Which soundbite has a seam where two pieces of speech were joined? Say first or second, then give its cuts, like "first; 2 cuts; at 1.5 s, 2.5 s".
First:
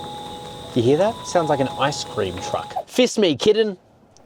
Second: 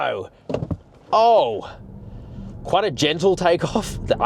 first; 2 cuts; at 0.7 s, 2.7 s